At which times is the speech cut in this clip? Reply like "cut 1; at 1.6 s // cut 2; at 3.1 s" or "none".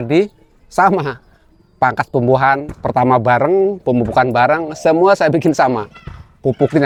none